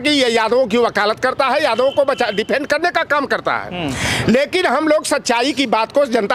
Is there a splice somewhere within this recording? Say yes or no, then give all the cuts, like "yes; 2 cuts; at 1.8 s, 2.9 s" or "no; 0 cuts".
no; 0 cuts